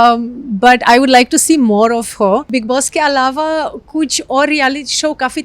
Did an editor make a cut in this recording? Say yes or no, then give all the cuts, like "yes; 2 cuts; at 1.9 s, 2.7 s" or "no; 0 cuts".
yes; 1 cut; at 2.5 s